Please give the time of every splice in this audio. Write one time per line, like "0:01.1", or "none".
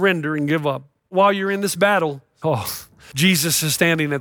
0:01.1
0:02.6

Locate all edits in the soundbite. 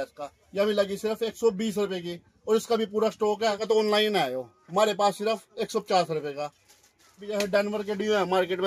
0:03.6
0:07.3

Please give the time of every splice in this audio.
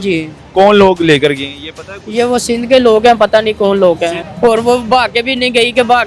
0:04.2

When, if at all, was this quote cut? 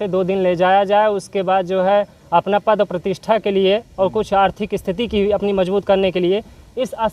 none

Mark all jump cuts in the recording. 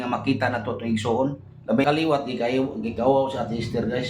0:01.8

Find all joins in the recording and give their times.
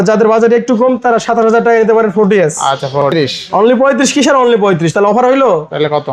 0:03.1

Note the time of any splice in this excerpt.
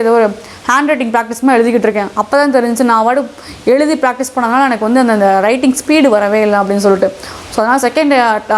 none

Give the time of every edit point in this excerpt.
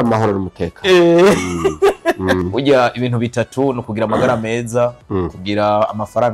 0:02.4

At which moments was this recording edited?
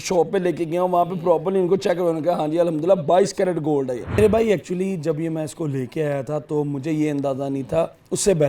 0:04.2

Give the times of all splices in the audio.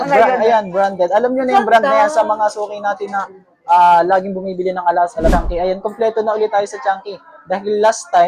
0:05.3

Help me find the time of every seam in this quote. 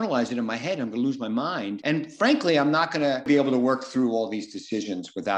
0:01.8
0:03.3

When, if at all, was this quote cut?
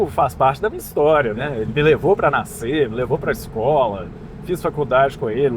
0:01.4

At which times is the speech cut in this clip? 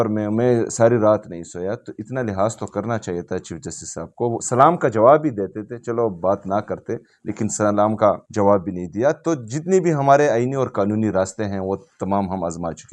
0:08.3

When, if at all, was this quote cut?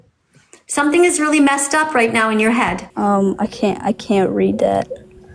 0:02.8

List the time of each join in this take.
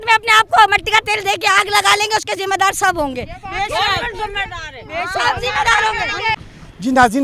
none

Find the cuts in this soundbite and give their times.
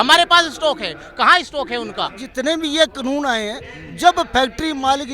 0:02.3

